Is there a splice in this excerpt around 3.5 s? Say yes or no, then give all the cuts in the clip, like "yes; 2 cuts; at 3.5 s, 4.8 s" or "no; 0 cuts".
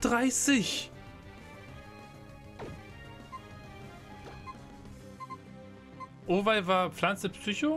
yes; 1 cut; at 3.5 s